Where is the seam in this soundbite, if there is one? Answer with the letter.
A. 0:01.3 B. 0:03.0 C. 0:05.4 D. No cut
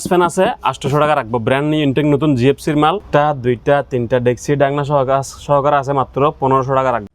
B